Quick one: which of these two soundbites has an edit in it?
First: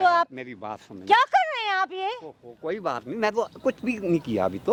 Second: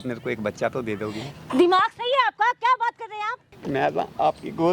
second; 1 cut; at 3.5 s

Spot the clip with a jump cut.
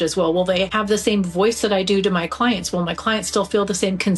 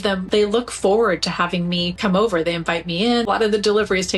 second; 1 cut; at 3.2 s

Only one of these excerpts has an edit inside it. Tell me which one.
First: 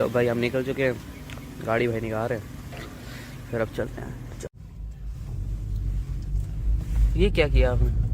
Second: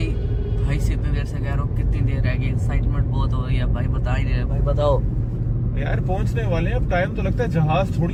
first; 1 cut; at 4.5 s

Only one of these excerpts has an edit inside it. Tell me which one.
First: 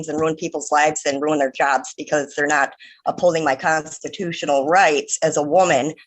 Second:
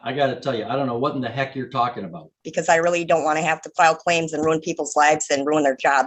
second; 1 cut; at 2.5 s

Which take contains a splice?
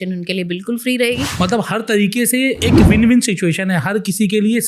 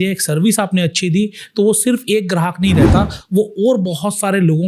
first; 2 cuts; at 1.3 s, 2.6 s

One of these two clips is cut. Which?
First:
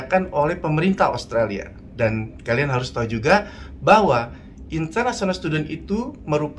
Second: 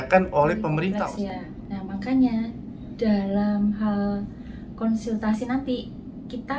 second; 1 cut; at 1.2 s

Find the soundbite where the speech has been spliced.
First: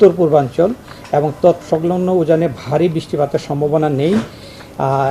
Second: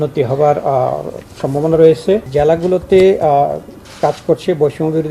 second; 1 cut; at 2.3 s

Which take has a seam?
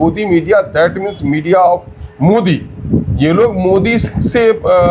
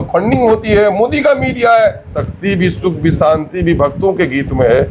second; 1 cut; at 2.1 s

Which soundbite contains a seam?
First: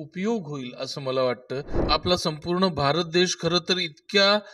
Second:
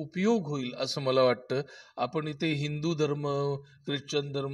first; 1 cut; at 1.8 s

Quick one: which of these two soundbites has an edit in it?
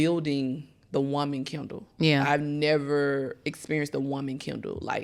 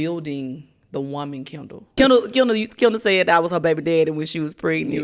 second; 1 cut; at 1.9 s

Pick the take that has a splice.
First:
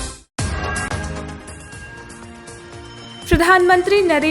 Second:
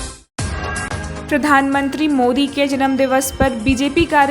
first; 1 cut; at 1.2 s

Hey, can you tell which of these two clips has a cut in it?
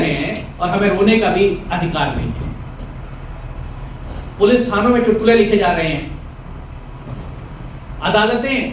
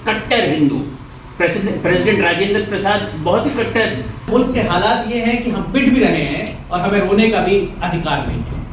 second; 1 cut; at 4.2 s

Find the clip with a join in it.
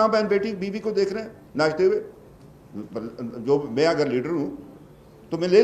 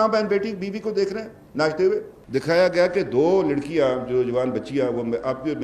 second; 1 cut; at 2.2 s

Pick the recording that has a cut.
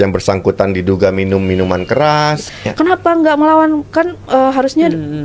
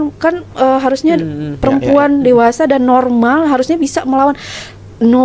first; 1 cut; at 2.6 s

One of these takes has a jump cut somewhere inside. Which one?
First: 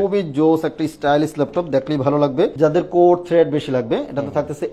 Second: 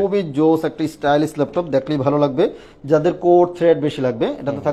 first; 1 cut; at 2.5 s

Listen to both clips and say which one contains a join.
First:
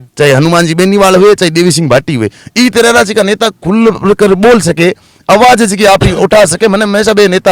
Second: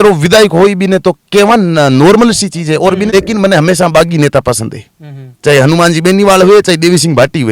second; 1 cut; at 3.1 s

